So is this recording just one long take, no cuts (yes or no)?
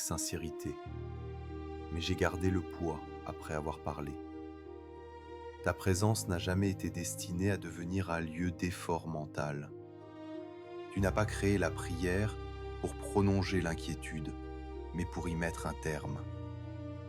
no